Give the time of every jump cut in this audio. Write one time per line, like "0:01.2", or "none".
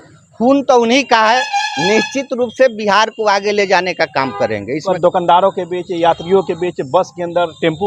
none